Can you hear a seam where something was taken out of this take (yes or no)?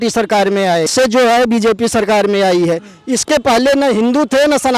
yes